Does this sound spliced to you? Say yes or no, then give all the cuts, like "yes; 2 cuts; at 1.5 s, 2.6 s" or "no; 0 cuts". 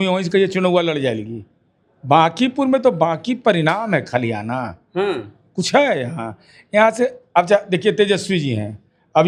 no; 0 cuts